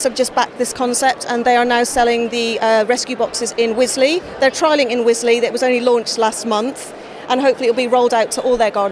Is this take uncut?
yes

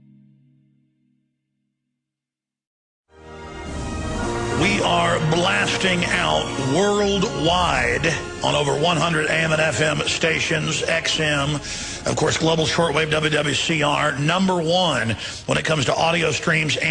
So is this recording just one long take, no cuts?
yes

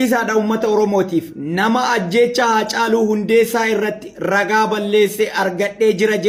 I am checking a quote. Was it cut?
no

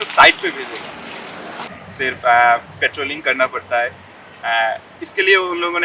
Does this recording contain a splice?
yes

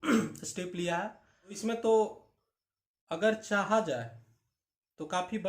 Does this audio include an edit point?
yes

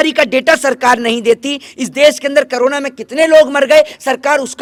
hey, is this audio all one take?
yes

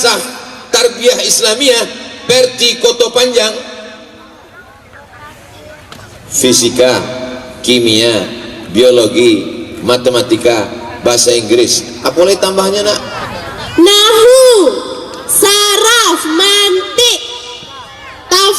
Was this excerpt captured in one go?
no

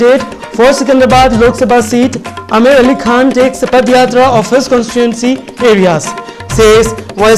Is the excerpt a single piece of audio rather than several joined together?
yes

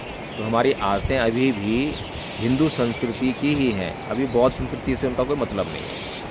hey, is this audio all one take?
yes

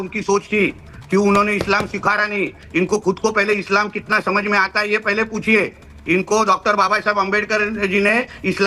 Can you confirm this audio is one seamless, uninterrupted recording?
yes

